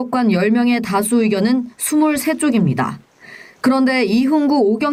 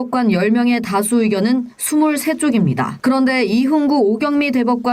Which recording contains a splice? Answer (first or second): second